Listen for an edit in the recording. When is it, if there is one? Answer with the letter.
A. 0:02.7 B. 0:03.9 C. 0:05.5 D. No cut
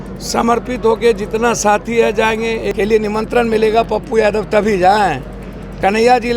A